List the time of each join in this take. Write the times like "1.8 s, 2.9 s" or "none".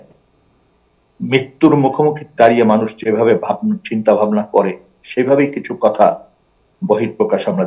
none

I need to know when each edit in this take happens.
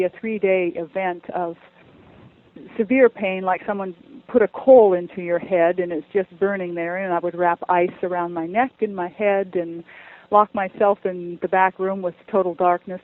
none

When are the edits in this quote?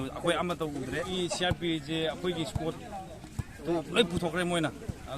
1.1 s

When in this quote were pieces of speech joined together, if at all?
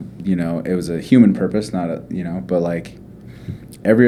none

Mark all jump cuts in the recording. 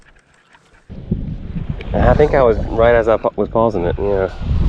0.9 s

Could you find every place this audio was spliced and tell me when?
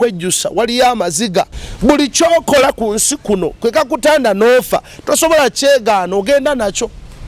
1.6 s

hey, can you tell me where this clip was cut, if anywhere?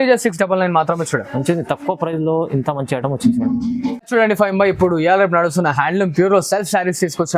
4.0 s

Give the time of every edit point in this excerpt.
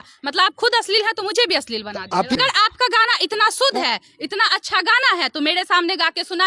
2.4 s

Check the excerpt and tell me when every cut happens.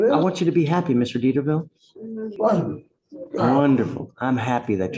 2.4 s

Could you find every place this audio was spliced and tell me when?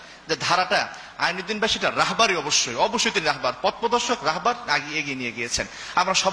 none

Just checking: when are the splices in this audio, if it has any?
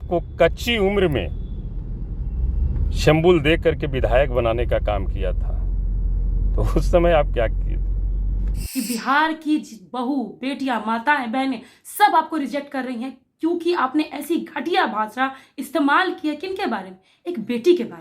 8.5 s

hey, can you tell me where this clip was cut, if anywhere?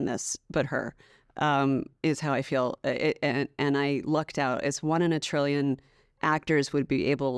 none

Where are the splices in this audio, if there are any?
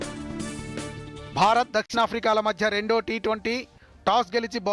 1.4 s

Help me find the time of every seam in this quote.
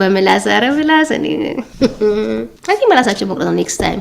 2.5 s

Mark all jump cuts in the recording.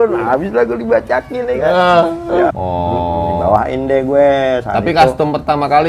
2.5 s

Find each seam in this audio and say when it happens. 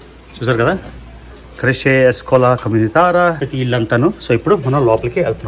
3.4 s

